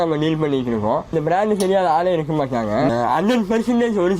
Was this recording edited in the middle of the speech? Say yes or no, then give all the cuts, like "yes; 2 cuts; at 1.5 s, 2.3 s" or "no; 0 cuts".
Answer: yes; 1 cut; at 2.9 s